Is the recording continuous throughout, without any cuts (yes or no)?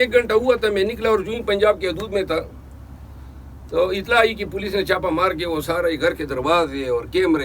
yes